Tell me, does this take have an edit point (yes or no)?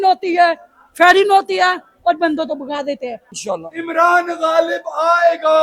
yes